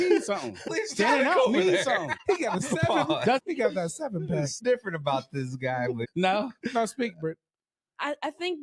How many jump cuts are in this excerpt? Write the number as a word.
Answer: five